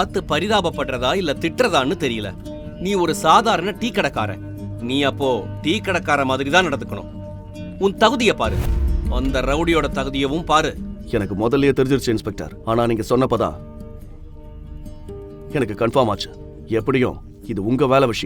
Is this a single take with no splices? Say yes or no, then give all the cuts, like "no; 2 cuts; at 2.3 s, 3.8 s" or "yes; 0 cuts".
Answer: yes; 0 cuts